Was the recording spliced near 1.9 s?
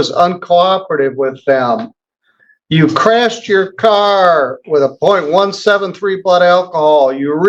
no; 0 cuts

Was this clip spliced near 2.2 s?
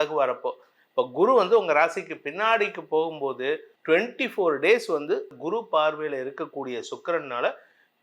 no; 2 cuts; at 3.7 s, 5.3 s

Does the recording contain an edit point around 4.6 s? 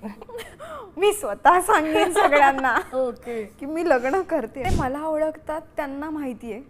yes; 1 cut; at 4.6 s

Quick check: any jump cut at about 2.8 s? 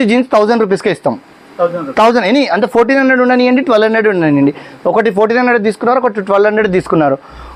no; 0 cuts

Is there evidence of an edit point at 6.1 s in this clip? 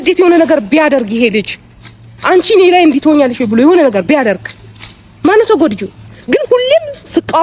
yes; 1 cut; at 6.1 s

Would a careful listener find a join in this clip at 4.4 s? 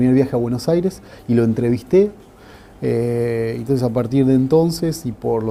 no; 0 cuts

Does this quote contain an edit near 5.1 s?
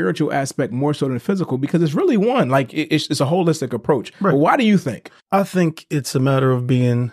yes; 1 cut; at 5.1 s

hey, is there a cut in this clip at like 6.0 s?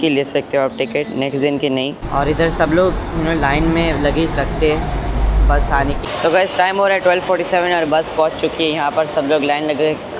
yes; 2 cuts; at 2.0 s, 6.0 s

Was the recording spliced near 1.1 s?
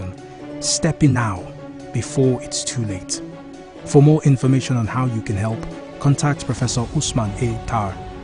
yes; 1 cut; at 1.1 s

